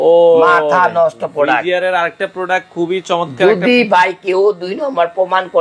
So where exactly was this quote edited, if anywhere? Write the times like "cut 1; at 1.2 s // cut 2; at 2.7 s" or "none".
none